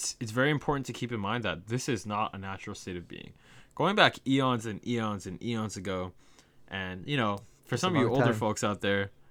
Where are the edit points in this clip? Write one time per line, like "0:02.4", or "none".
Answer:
none